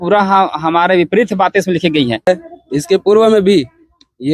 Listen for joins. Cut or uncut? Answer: cut